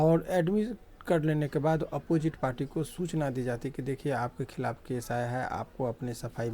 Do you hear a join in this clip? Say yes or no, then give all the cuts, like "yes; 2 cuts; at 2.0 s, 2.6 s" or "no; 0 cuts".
no; 0 cuts